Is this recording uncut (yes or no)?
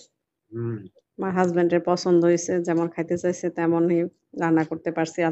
no